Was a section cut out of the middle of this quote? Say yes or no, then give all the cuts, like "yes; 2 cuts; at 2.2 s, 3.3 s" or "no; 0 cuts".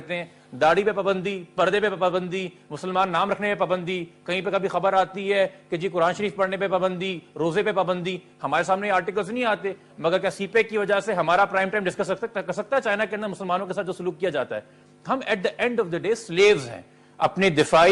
no; 0 cuts